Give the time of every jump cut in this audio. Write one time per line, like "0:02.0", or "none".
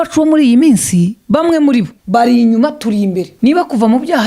0:01.2
0:02.0
0:03.3